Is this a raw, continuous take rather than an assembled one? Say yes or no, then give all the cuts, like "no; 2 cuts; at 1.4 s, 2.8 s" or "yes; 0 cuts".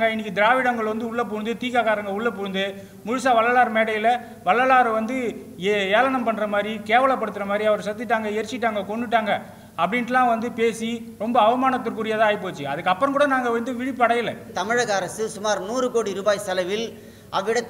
no; 1 cut; at 14.5 s